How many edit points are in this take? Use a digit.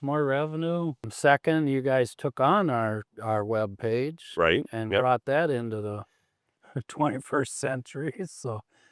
1